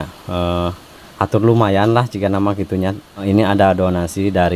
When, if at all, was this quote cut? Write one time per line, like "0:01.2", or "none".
0:03.2

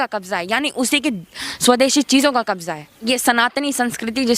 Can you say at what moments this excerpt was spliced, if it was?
0:03.1

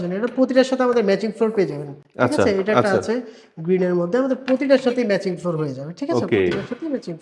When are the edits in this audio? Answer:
none

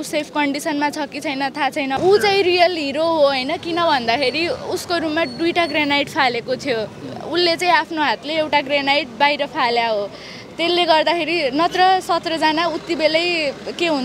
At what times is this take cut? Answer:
0:02.0

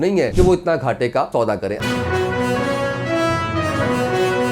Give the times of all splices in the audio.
0:01.3

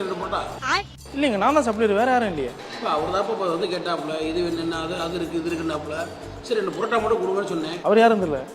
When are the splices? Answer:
0:01.0
0:02.6
0:07.7

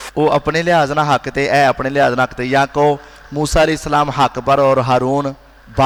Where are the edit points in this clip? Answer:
none

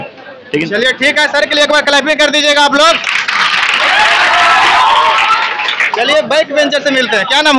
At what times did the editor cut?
0:05.9

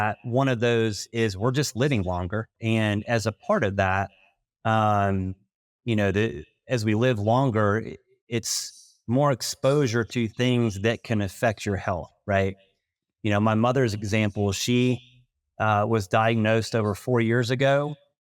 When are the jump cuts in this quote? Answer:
0:02.5

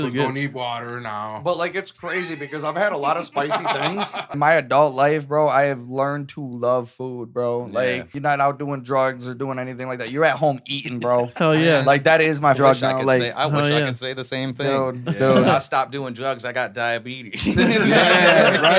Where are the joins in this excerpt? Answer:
0:04.3
0:08.1

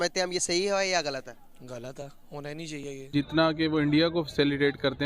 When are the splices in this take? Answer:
0:03.1

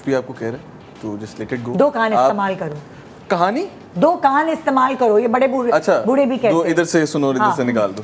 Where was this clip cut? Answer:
none

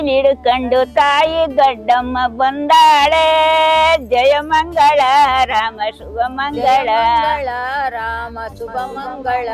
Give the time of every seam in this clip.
none

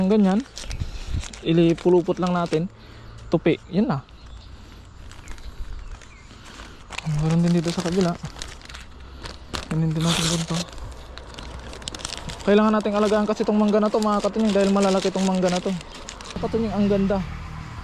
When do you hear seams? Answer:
0:16.4

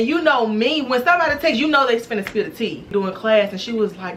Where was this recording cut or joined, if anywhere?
0:02.9

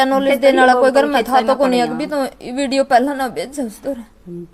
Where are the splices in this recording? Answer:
none

